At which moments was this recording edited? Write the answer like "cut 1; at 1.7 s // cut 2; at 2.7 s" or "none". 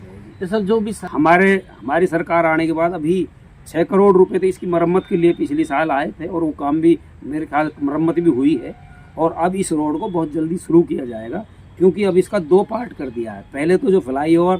cut 1; at 0.9 s